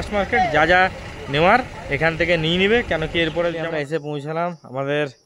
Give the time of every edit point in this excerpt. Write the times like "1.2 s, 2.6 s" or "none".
3.6 s